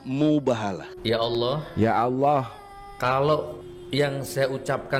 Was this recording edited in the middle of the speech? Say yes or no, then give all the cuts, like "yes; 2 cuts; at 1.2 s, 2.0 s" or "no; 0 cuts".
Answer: no; 0 cuts